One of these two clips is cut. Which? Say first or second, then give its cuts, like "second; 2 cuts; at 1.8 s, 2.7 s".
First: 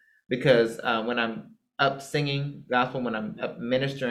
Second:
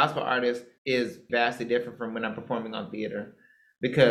second; 1 cut; at 1.3 s